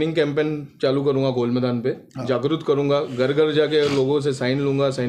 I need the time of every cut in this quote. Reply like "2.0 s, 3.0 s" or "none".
none